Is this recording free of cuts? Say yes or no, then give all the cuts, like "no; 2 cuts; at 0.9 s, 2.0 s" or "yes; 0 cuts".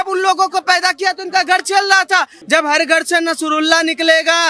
no; 1 cut; at 2.3 s